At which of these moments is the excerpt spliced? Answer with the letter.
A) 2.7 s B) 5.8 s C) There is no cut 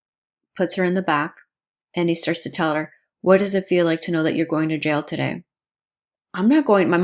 C